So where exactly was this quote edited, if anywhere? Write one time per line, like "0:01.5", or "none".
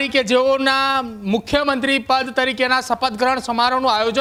none

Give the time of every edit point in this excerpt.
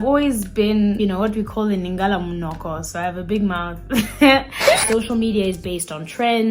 0:01.0
0:04.8

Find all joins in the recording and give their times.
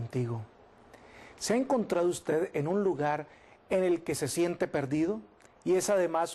0:04.3

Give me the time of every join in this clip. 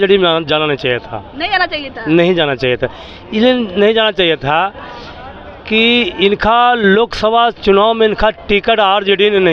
none

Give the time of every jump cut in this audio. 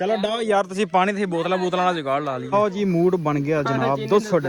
0:02.5

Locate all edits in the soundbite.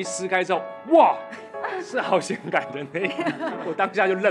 none

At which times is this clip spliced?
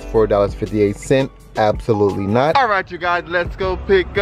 0:02.5

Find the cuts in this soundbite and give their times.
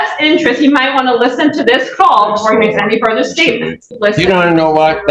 0:04.0

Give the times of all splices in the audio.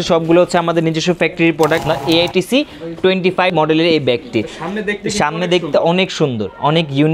0:01.8
0:03.5

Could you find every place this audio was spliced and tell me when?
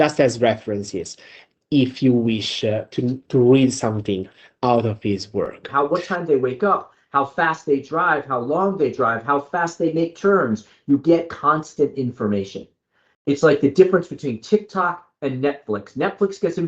0:05.9

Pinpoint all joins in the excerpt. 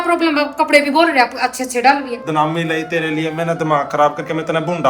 0:02.2

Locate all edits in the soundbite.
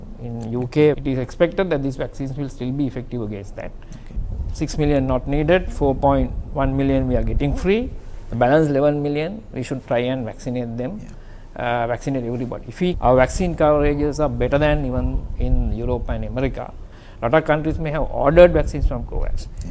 0:01.0
0:04.2
0:13.0
0:17.0

